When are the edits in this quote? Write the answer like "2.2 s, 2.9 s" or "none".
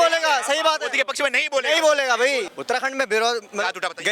2.5 s